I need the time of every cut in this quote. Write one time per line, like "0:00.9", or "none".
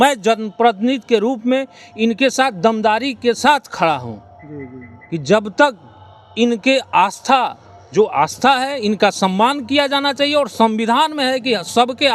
none